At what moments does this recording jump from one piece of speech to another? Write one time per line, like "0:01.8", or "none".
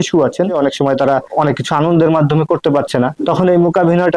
0:01.1
0:03.2